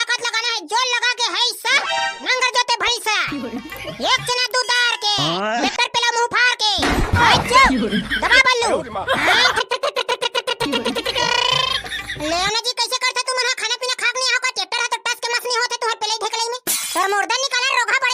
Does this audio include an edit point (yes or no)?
no